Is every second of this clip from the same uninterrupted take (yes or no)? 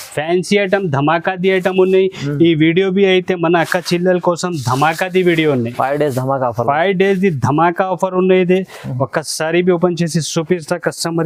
yes